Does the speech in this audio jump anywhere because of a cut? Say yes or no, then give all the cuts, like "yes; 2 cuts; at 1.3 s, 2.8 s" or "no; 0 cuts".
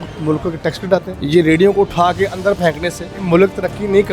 yes; 2 cuts; at 1.1 s, 3.1 s